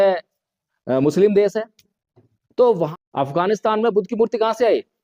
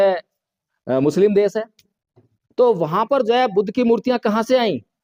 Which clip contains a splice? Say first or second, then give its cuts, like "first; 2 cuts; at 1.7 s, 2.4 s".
first; 1 cut; at 2.9 s